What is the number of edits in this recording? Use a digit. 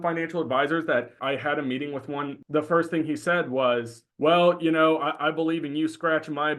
3